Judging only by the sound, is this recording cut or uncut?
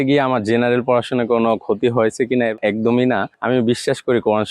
cut